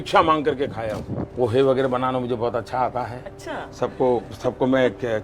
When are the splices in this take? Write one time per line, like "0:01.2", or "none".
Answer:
0:01.3